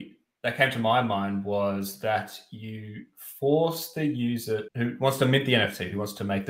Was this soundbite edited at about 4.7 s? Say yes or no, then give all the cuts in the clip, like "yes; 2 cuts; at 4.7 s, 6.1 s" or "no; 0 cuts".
yes; 1 cut; at 4.7 s